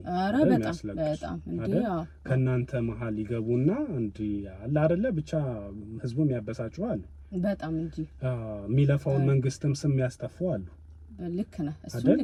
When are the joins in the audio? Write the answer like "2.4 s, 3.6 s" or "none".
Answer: none